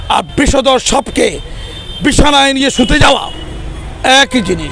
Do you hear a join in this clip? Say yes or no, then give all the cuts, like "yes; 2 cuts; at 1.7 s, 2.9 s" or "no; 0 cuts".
no; 0 cuts